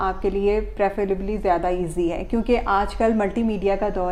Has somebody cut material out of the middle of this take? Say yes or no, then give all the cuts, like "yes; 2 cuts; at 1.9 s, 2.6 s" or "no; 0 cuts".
no; 0 cuts